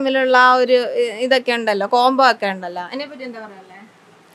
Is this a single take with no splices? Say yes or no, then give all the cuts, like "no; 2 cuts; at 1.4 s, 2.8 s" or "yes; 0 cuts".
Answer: yes; 0 cuts